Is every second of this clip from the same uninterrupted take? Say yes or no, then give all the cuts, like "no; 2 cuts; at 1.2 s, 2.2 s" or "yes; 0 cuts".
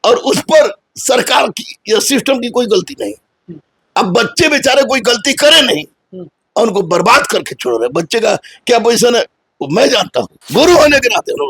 no; 1 cut; at 10.4 s